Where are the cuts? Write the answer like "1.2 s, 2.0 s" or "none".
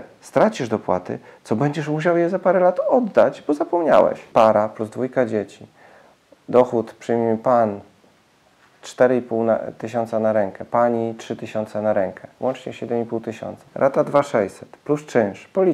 4.2 s, 13.6 s